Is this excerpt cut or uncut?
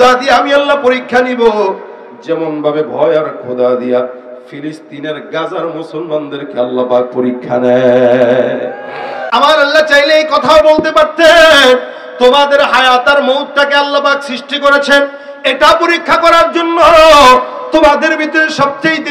cut